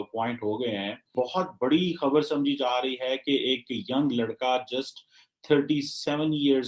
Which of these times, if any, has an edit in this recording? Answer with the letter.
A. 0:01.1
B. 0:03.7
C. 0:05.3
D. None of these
A